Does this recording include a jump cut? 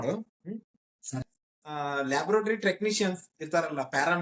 yes; 1 cut; at 1.2 s

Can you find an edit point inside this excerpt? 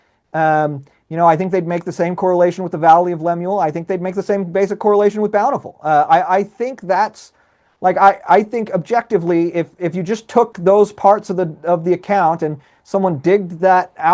no; 0 cuts

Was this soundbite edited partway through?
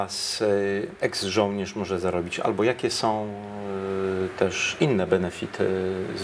no; 0 cuts

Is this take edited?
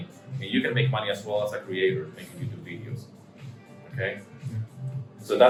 no; 0 cuts

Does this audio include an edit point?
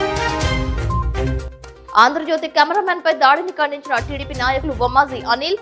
yes; 1 cut; at 1.5 s

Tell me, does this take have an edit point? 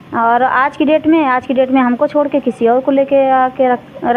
no; 0 cuts

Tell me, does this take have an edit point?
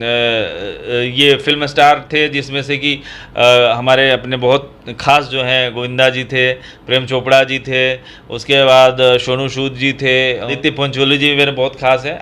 yes; 1 cut; at 10.5 s

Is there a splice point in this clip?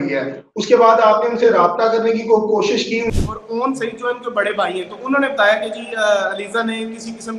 yes; 1 cut; at 3.1 s

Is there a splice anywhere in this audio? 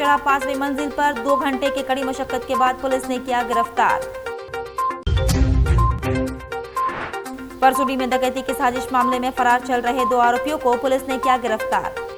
no; 0 cuts

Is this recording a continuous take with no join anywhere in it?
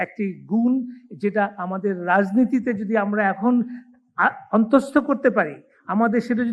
yes; 0 cuts

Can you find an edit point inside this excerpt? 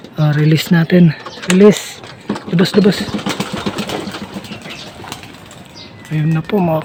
no; 0 cuts

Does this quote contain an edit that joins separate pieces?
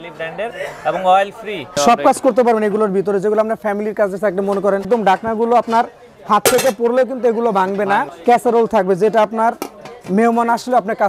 yes; 3 cuts; at 1.8 s, 4.9 s, 8.1 s

